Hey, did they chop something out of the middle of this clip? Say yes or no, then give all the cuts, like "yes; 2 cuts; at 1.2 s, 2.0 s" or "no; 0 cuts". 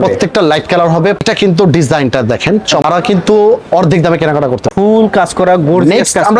yes; 3 cuts; at 1.2 s, 2.8 s, 4.7 s